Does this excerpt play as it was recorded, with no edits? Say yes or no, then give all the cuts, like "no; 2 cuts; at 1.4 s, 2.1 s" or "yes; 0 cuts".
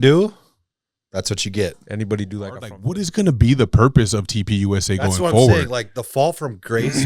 no; 1 cut; at 2.8 s